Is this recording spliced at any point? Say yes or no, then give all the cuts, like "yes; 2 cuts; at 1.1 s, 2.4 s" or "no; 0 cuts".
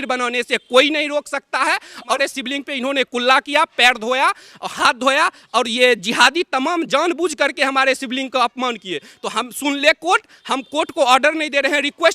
yes; 1 cut; at 2.2 s